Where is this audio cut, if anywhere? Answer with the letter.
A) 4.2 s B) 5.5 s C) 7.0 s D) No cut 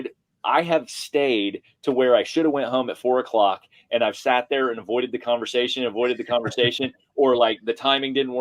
D